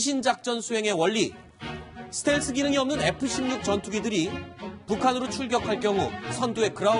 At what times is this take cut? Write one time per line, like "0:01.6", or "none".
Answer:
0:03.3